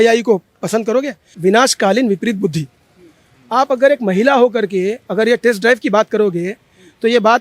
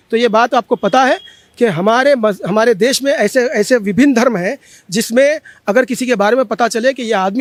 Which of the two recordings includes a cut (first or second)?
first